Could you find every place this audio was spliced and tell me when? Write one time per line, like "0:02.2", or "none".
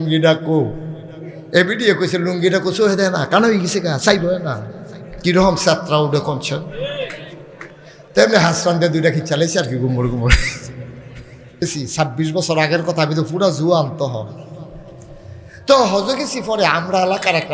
0:11.6